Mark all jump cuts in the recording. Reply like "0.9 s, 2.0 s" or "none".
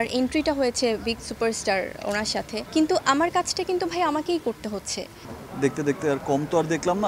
2.6 s, 5.3 s